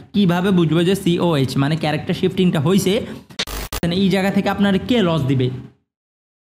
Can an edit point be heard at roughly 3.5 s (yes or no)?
yes